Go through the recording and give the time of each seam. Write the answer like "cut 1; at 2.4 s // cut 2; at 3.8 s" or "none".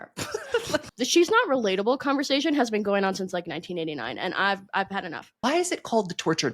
cut 1; at 0.9 s // cut 2; at 5.2 s